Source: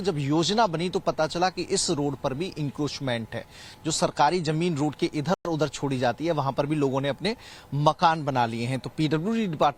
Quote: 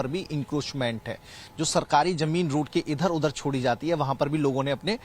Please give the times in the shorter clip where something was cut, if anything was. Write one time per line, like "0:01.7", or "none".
0:03.1